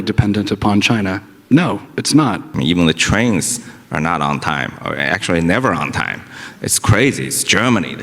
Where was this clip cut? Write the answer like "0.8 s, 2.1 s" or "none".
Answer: 2.5 s